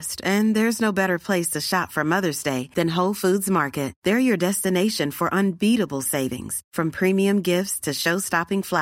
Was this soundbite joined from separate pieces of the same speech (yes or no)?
no